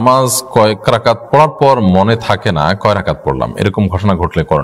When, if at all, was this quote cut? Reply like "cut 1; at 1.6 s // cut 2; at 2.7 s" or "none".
none